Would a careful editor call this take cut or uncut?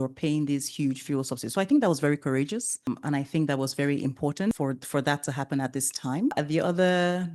cut